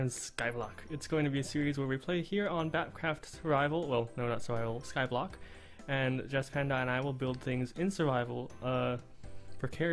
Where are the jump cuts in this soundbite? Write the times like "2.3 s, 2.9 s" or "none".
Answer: none